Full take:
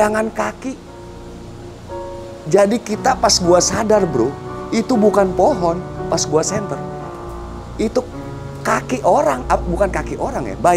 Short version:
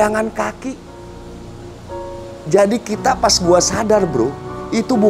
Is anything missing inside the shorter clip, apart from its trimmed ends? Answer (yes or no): no